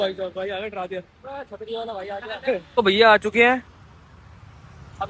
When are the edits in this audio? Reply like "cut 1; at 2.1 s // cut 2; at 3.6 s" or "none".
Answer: cut 1; at 2.6 s